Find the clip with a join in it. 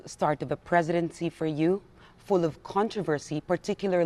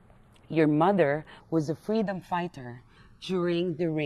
second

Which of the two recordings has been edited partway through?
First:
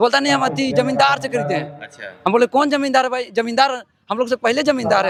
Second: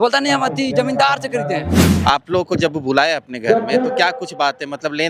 second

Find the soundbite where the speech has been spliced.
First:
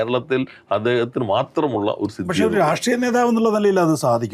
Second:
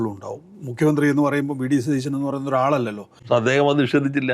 second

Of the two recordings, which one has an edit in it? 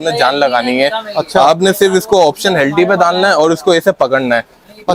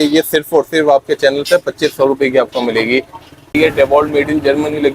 second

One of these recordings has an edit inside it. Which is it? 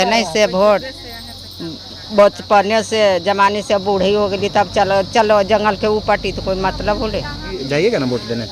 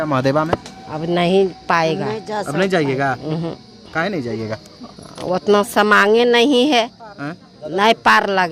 first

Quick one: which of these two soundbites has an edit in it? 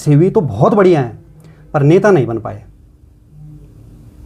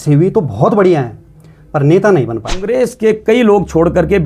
second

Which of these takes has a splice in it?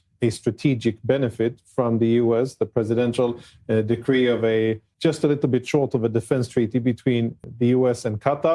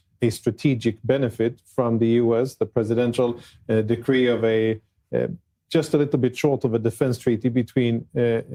first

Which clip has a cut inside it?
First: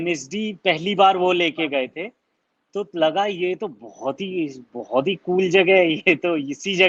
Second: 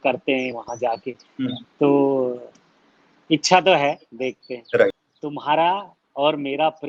second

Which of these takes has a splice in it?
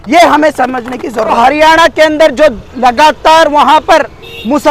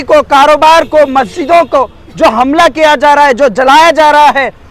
first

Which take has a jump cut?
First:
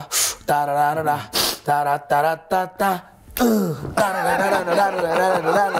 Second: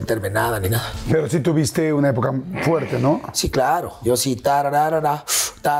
second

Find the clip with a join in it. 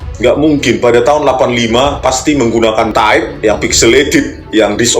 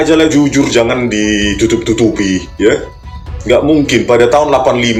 first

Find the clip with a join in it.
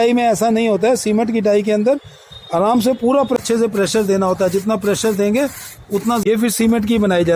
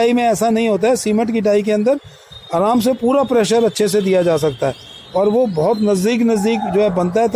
first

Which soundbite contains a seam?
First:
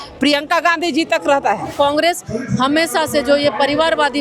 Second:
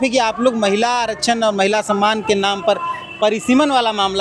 first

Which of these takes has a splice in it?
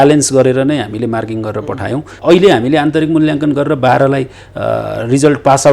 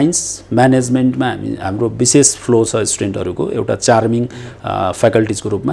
first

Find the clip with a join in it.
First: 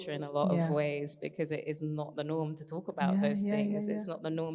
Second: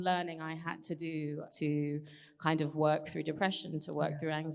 second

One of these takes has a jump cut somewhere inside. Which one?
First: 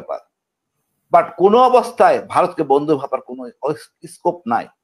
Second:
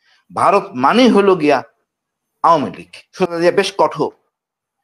second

